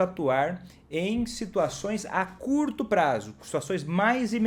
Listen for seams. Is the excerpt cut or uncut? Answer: uncut